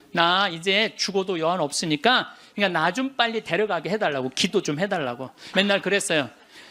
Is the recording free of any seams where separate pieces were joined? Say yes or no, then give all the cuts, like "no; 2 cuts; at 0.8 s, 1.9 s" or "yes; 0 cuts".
no; 2 cuts; at 2.4 s, 5.4 s